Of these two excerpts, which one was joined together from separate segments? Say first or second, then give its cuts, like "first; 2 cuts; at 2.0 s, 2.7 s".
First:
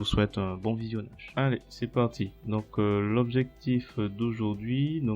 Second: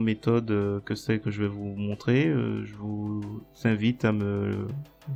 first; 1 cut; at 1.2 s